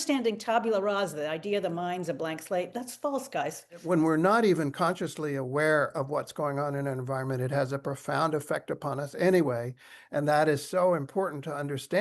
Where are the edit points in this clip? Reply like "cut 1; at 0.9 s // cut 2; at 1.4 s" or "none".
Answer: cut 1; at 3.8 s